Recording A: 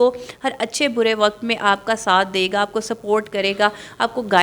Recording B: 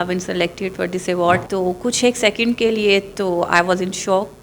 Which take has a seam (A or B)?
B